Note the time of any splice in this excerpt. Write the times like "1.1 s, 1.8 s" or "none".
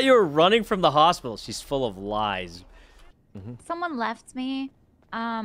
3.1 s